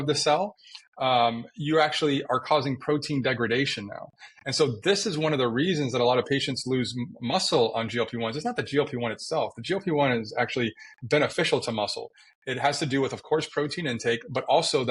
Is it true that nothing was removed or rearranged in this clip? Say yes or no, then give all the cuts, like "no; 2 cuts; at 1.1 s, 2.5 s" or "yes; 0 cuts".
yes; 0 cuts